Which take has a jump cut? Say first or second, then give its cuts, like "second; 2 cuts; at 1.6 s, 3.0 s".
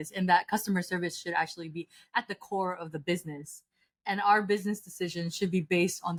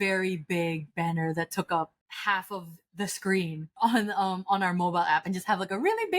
second; 2 cuts; at 2.0 s, 3.7 s